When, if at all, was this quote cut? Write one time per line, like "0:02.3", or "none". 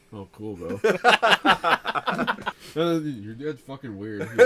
0:02.4